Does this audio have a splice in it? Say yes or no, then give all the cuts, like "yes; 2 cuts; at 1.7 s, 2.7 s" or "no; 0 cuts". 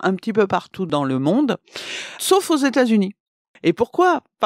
yes; 1 cut; at 2.2 s